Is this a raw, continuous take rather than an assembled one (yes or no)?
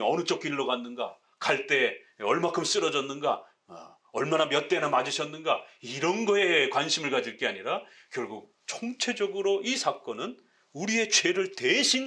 yes